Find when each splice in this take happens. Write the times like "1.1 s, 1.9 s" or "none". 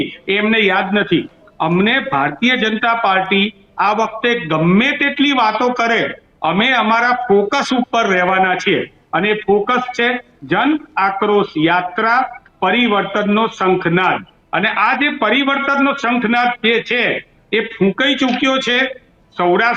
none